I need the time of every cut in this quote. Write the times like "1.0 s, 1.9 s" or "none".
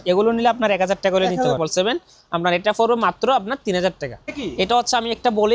1.6 s, 4.3 s